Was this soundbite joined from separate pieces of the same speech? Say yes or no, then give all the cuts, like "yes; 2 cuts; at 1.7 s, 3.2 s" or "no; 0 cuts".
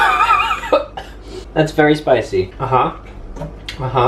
yes; 1 cut; at 2.6 s